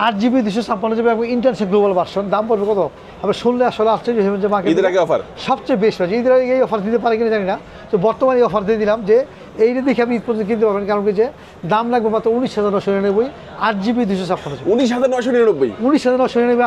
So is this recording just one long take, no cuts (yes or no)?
yes